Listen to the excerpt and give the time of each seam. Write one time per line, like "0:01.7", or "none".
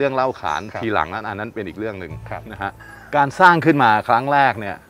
0:02.9